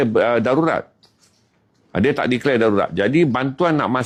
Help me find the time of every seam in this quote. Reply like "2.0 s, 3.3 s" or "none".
none

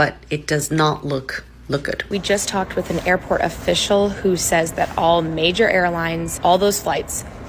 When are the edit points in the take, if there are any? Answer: 2.0 s, 6.3 s

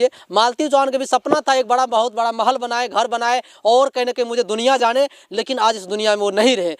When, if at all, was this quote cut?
none

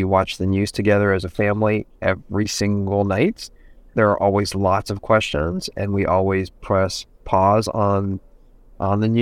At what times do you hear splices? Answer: none

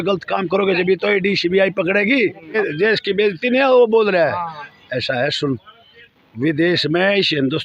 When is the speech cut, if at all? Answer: 2.6 s

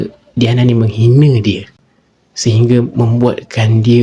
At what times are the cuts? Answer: none

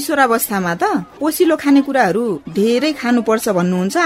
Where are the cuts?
1.1 s, 2.4 s

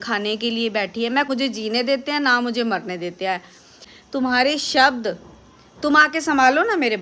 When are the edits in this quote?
1.3 s, 3.9 s

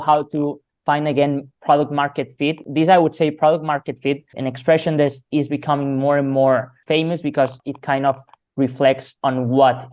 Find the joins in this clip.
2.6 s, 4.3 s, 6.7 s, 7.6 s

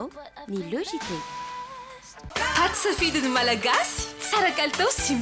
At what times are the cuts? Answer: 2.1 s

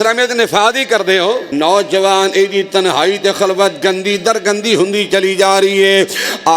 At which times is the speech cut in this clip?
1.5 s

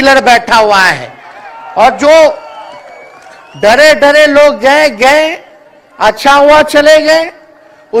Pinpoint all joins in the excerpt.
none

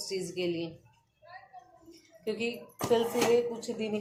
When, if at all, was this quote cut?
none

